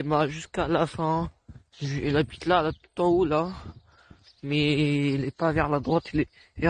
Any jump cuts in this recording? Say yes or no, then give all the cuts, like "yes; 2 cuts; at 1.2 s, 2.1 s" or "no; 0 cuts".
no; 0 cuts